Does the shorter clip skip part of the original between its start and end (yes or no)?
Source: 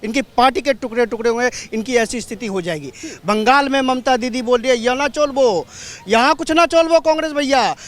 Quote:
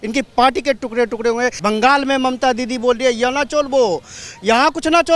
yes